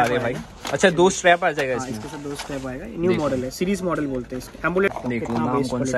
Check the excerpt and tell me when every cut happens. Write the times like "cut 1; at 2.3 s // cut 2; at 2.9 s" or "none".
cut 1; at 4.9 s